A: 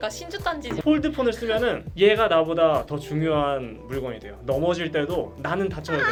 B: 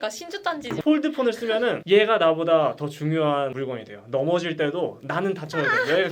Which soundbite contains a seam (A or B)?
B